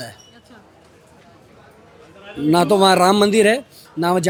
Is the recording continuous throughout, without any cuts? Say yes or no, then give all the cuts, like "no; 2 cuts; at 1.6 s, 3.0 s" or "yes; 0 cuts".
yes; 0 cuts